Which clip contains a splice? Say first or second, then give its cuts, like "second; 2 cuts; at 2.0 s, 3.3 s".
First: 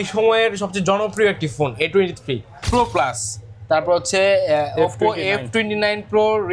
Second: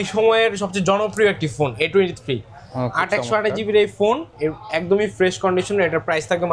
first; 1 cut; at 2.6 s